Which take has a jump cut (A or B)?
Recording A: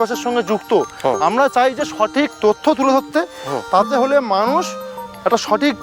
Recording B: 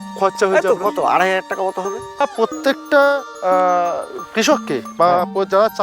B